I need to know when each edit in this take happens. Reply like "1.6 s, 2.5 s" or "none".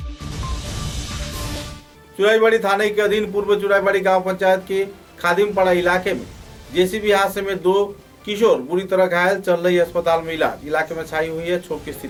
none